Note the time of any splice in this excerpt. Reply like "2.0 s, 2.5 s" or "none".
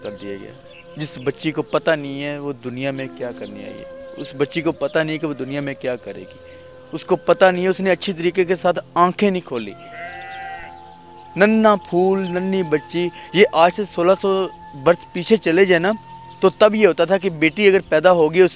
none